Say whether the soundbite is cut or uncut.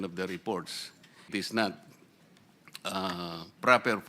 cut